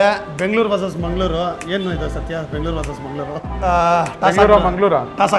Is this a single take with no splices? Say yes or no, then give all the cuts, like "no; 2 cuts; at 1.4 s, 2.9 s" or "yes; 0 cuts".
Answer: no; 1 cut; at 3.4 s